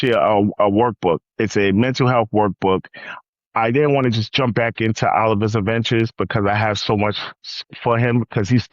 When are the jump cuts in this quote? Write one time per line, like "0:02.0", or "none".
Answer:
0:03.2